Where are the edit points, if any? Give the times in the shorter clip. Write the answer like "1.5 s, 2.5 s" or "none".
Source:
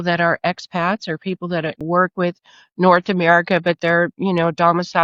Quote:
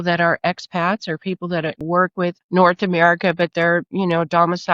2.4 s